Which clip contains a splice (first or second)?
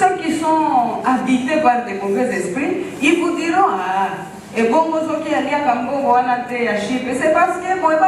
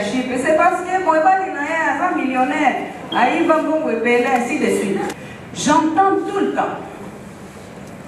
second